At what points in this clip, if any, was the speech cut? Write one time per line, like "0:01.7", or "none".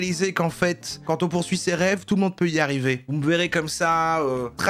0:03.0